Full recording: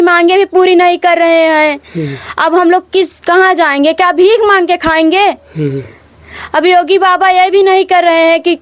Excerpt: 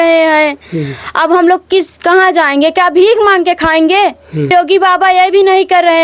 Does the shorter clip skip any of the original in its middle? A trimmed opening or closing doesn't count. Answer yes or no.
yes